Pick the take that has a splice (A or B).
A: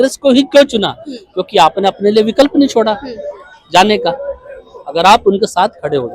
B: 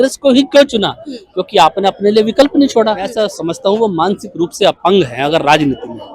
B